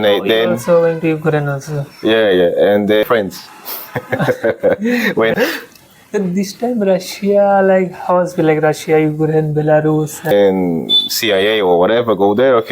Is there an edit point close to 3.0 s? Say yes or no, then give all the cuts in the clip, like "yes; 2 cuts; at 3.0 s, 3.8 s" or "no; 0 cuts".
yes; 3 cuts; at 3.0 s, 5.3 s, 10.3 s